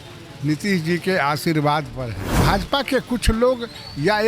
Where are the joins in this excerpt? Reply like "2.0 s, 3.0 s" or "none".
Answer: 2.2 s